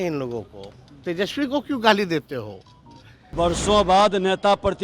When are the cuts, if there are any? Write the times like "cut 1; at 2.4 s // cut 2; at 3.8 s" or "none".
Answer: cut 1; at 3.3 s